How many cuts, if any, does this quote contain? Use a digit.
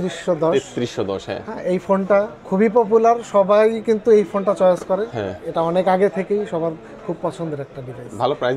0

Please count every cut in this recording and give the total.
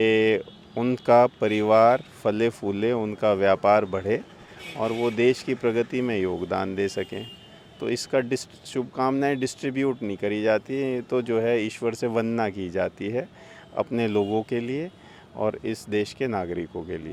0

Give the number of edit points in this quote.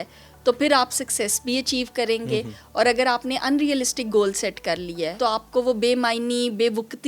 1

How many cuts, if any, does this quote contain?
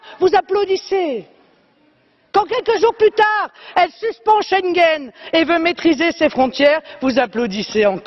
1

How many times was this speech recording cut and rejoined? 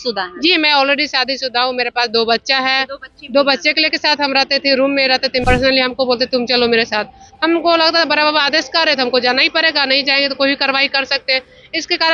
1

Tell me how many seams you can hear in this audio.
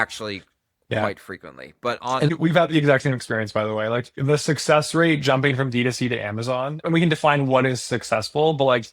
3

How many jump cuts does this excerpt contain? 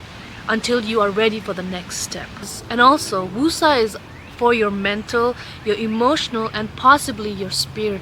0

